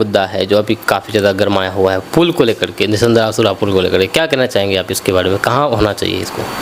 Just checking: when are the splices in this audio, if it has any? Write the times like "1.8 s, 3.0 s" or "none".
none

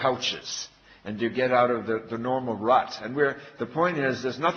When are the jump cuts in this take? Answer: none

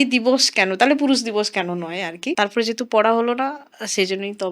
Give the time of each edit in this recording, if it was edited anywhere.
2.3 s

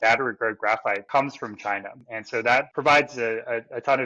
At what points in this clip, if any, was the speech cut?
1.0 s, 2.4 s

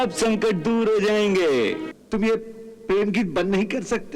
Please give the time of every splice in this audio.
1.8 s

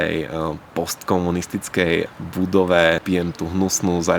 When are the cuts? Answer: 2.1 s, 3.0 s

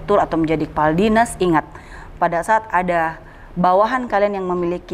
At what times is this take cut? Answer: none

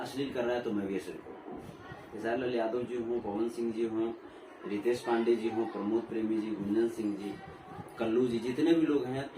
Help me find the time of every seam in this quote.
2.1 s

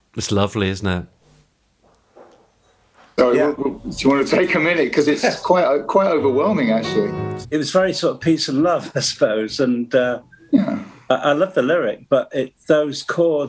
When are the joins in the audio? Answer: 1.2 s, 7.3 s

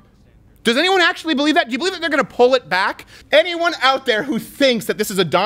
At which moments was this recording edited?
3.1 s

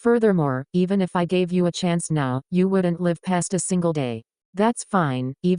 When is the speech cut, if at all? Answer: 4.5 s

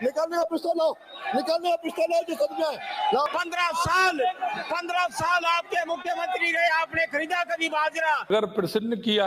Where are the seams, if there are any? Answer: 3.3 s, 8.3 s

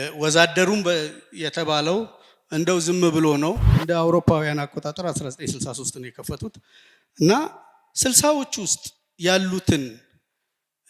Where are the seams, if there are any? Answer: 3.7 s

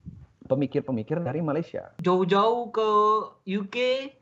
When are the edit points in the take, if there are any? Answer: 1.9 s

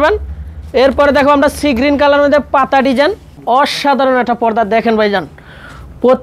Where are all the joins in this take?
3.4 s

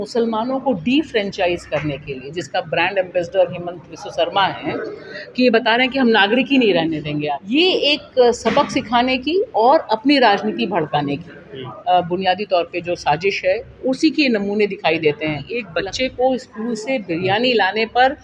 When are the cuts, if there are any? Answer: 7.4 s, 15.6 s

